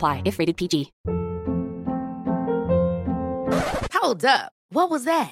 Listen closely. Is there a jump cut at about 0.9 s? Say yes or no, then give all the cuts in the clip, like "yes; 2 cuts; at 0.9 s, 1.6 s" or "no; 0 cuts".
yes; 1 cut; at 0.9 s